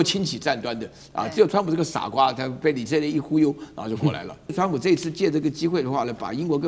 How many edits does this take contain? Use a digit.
1